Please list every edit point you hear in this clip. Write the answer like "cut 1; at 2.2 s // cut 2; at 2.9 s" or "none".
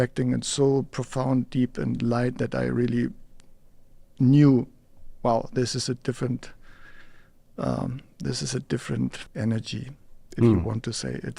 cut 1; at 9.2 s